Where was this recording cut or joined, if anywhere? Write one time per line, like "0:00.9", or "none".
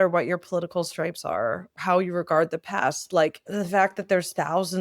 0:01.7
0:03.4